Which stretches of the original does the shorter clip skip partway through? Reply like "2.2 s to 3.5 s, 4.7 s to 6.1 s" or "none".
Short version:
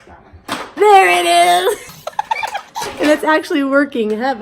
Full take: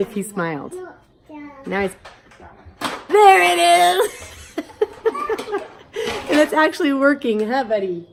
4.7 s to 5.7 s